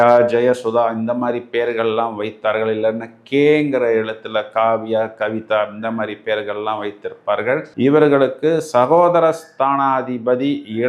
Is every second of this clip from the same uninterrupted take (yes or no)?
no